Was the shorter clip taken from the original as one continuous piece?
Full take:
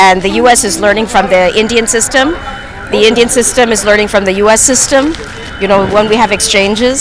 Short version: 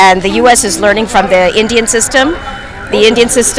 yes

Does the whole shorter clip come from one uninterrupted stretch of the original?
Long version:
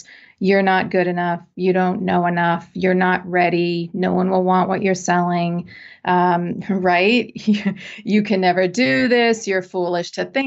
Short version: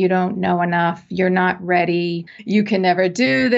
no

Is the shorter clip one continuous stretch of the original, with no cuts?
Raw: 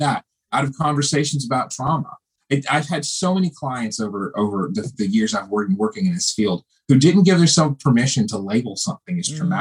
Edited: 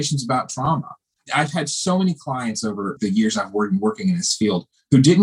no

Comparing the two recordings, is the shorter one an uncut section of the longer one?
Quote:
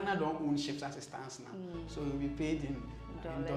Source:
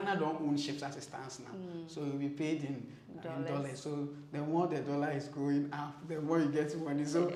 yes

